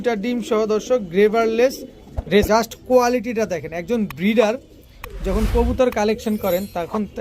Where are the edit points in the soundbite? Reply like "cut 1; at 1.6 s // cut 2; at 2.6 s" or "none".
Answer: cut 1; at 2.5 s

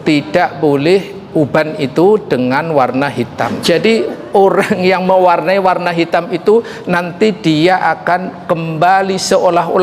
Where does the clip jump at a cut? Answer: cut 1; at 3.6 s

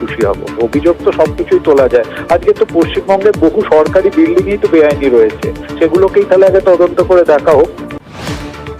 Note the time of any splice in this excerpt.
cut 1; at 7.9 s

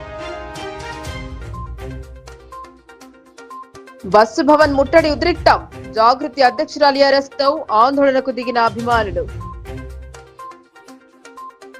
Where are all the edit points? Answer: none

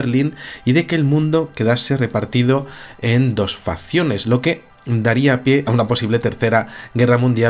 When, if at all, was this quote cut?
cut 1; at 3.4 s

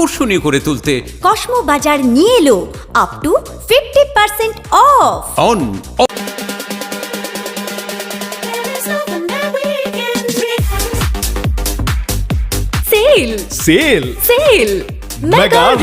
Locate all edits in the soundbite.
cut 1; at 6.1 s

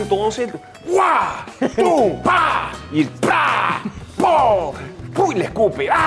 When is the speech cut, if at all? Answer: none

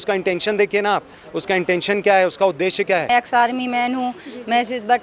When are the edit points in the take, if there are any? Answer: cut 1; at 3.1 s

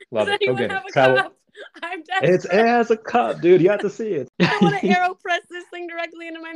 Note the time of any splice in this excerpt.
cut 1; at 4.3 s

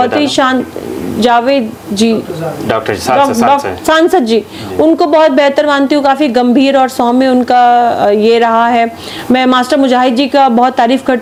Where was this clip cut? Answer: none

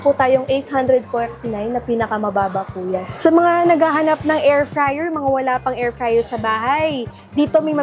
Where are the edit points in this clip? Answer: cut 1; at 3.1 s

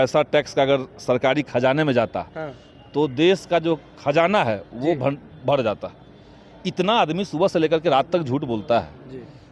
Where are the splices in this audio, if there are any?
none

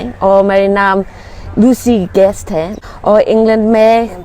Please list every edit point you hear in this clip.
cut 1; at 2.8 s

